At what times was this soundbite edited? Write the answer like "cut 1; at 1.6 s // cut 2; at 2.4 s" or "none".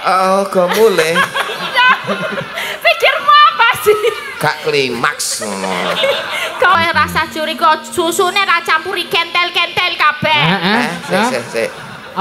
cut 1; at 6.8 s